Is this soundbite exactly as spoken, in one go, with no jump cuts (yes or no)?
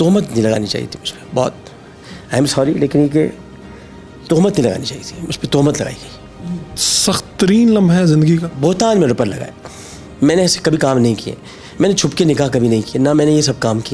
yes